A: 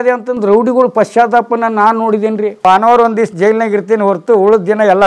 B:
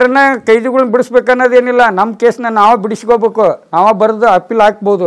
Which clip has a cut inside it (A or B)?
A